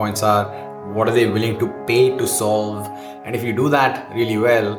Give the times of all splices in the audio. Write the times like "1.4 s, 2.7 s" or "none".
none

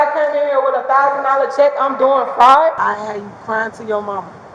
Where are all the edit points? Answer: 2.8 s

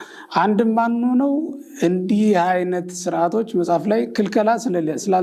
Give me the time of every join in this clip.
none

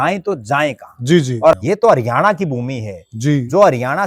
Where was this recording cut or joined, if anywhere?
1.5 s

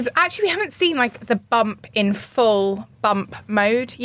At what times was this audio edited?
none

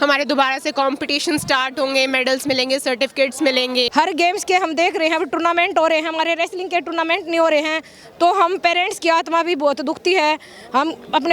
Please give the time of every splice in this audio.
3.9 s

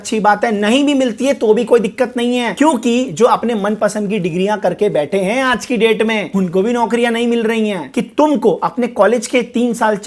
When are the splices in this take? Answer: 7.9 s

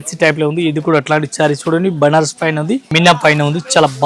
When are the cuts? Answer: 2.9 s

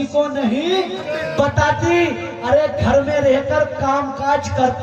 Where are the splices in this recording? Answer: 1.0 s

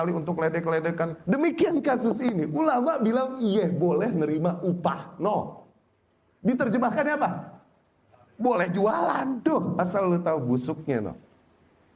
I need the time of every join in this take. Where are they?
1.2 s, 9.4 s

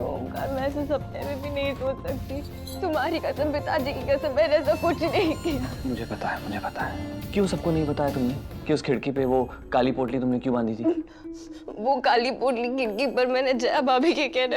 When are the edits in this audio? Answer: 7.3 s

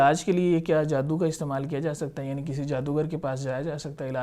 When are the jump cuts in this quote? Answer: none

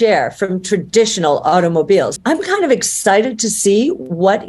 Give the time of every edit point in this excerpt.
2.1 s

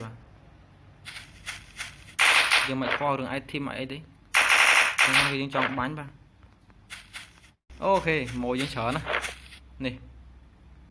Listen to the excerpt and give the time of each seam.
7.7 s

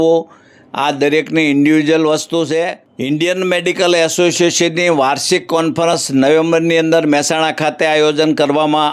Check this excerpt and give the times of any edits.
2.9 s

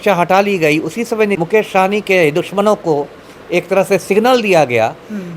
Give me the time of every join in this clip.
1.4 s

